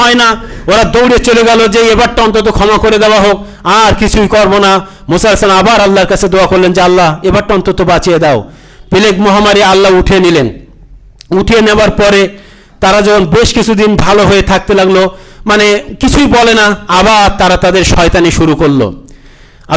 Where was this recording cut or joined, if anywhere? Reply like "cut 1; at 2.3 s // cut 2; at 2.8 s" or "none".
none